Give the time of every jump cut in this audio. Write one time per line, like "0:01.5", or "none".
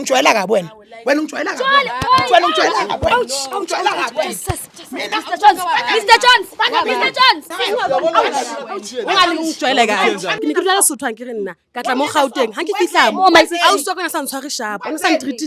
0:10.3

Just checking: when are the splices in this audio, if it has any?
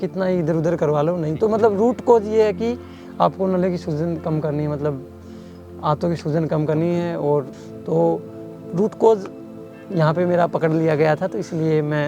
0:07.6

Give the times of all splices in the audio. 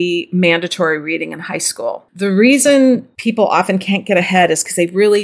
0:02.1
0:03.1

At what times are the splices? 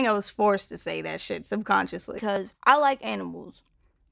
0:02.5

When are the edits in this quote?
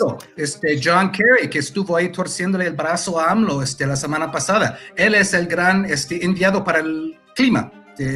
none

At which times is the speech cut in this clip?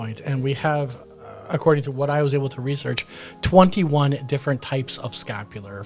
none

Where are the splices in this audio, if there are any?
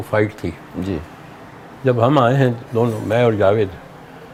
none

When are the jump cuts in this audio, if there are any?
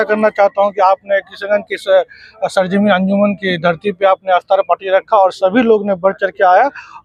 none

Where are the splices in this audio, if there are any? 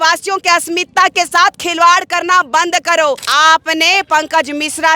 0:03.2

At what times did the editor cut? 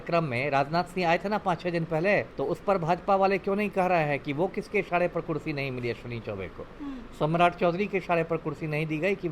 0:02.3

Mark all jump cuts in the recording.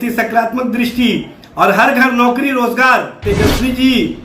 0:03.2

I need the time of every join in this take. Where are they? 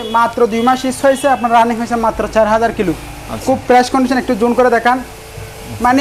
none

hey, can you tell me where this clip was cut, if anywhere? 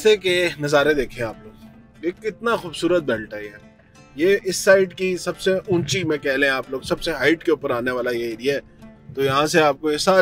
none

